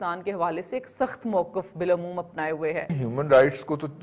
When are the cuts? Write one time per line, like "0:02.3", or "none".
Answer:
0:03.0